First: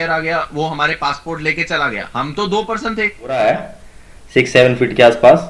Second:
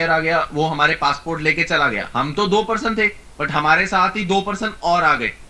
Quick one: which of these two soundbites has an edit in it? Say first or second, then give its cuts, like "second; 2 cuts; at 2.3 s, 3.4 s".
first; 1 cut; at 3.3 s